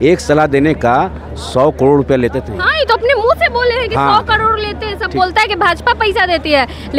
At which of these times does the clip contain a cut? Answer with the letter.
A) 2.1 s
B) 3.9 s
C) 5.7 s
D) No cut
D